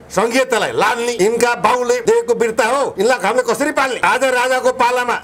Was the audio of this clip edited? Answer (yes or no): yes